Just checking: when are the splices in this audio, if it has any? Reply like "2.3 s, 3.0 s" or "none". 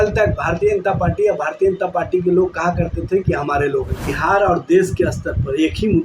4.1 s